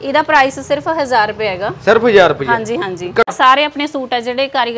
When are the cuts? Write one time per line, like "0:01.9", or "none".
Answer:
0:03.3